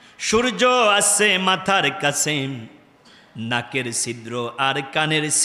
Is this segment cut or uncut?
uncut